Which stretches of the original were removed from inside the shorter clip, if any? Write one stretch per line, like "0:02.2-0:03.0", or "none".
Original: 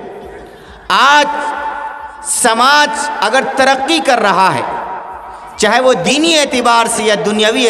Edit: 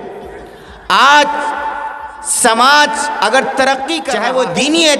0:04.0-0:05.5